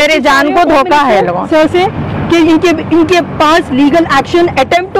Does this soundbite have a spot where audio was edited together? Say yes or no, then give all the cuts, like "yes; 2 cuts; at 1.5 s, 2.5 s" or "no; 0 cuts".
no; 0 cuts